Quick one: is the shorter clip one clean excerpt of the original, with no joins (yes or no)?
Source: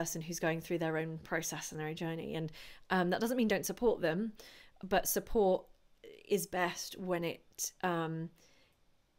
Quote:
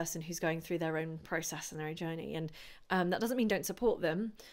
yes